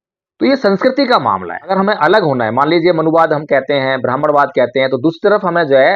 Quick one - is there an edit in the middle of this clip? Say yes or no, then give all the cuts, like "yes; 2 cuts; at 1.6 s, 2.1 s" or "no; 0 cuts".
yes; 1 cut; at 1.7 s